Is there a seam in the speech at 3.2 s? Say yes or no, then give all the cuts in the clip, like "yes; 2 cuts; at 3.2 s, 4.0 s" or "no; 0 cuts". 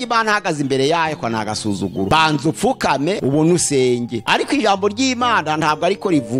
yes; 3 cuts; at 2.1 s, 3.2 s, 4.2 s